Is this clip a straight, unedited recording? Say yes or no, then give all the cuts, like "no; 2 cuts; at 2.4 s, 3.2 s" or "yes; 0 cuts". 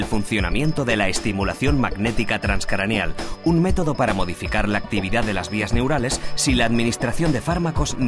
no; 1 cut; at 3.5 s